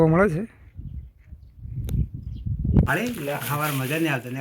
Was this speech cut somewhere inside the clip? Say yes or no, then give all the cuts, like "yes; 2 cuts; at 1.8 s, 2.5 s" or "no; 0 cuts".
yes; 1 cut; at 3.0 s